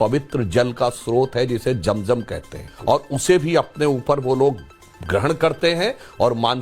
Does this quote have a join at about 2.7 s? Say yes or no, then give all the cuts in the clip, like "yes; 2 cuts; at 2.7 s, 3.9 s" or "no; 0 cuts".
yes; 1 cut; at 2.7 s